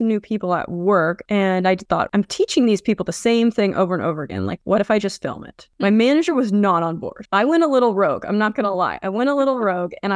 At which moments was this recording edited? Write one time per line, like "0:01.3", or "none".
0:01.2
0:02.1